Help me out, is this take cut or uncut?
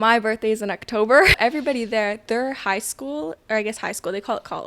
cut